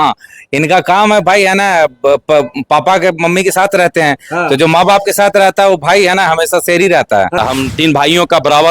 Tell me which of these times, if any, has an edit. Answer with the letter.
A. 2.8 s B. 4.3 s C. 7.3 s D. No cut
C